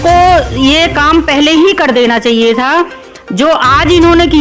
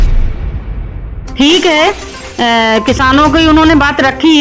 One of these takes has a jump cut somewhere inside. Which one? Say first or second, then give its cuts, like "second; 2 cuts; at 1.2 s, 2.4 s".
second; 1 cut; at 1.2 s